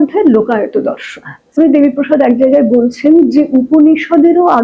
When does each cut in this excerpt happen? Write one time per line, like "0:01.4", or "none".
0:01.6